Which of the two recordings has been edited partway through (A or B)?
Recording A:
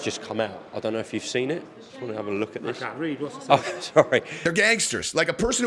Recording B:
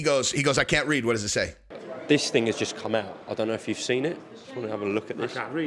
A